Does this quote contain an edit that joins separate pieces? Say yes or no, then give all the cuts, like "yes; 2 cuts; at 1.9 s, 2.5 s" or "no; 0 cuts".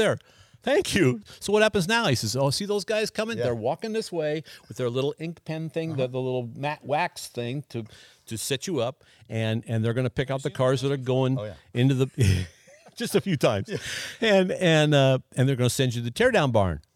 yes; 1 cut; at 1.2 s